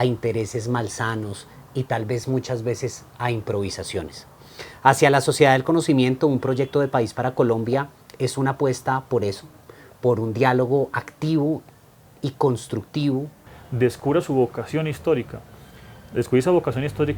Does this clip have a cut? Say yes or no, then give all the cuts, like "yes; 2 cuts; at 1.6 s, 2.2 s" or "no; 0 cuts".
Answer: yes; 1 cut; at 13.5 s